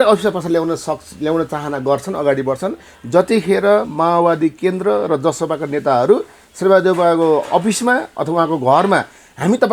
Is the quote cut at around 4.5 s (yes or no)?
no